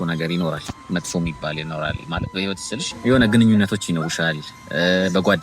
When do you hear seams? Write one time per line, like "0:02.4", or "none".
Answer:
0:03.0